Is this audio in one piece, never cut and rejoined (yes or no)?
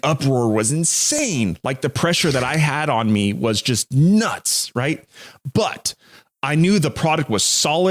yes